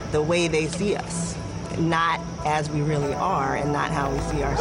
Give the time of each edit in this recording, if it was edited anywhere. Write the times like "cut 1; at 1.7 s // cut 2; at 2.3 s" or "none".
none